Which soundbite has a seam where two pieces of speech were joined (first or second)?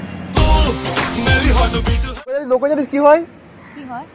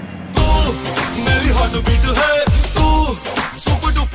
first